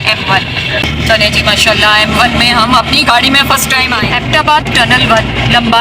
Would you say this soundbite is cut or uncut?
cut